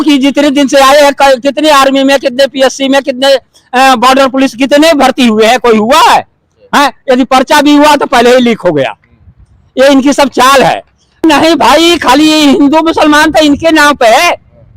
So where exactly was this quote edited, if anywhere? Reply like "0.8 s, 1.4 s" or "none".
11.2 s